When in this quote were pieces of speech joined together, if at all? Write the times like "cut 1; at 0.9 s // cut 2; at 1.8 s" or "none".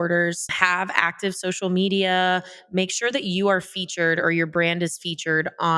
none

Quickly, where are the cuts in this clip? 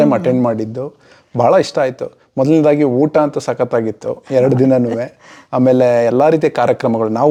none

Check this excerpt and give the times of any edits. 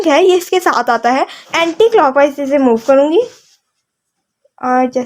cut 1; at 1.4 s

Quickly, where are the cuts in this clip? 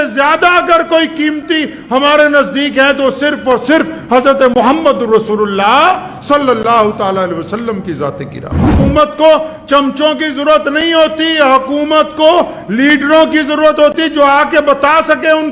cut 1; at 8.7 s

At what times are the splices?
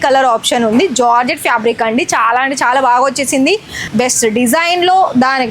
cut 1; at 3.8 s

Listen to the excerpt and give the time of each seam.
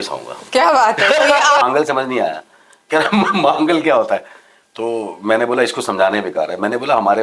cut 1; at 1.6 s

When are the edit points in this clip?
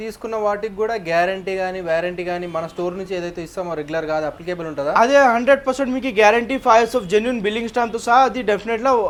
none

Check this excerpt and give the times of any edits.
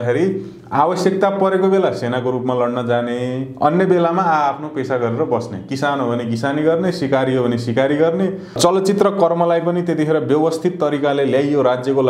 cut 1; at 8.5 s

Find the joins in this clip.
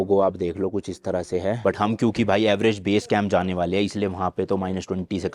cut 1; at 1.6 s

